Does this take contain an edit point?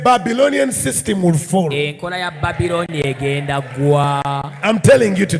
no; 0 cuts

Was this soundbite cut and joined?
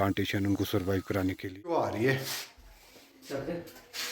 yes; 1 cut; at 1.8 s

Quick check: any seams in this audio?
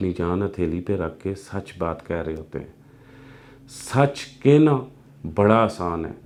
no; 0 cuts

